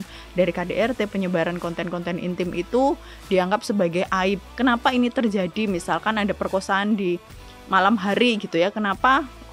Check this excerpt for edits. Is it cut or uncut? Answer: cut